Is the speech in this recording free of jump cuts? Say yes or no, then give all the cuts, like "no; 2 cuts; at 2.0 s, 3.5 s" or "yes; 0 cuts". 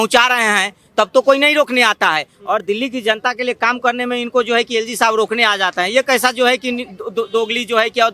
yes; 0 cuts